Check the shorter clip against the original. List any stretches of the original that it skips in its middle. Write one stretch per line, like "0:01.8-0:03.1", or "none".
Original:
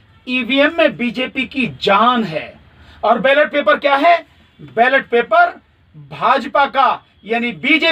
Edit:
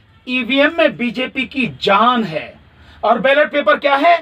none